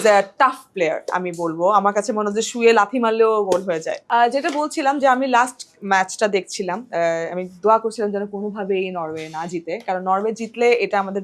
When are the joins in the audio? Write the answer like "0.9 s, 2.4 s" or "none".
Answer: none